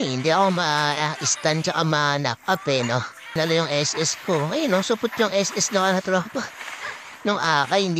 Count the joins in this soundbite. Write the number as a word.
one